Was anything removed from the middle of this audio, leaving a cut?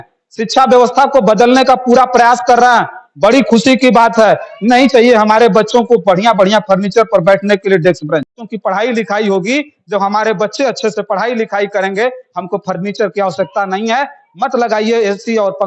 no; 0 cuts

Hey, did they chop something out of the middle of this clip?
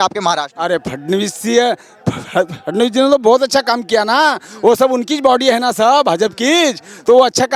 no; 0 cuts

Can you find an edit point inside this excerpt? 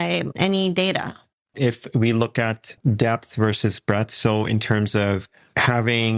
yes; 2 cuts; at 1.3 s, 2.7 s

